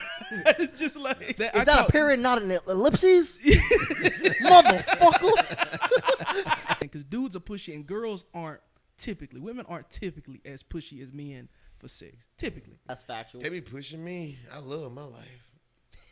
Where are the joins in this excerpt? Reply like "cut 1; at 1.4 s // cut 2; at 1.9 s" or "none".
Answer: cut 1; at 1.3 s // cut 2; at 6.8 s // cut 3; at 12.9 s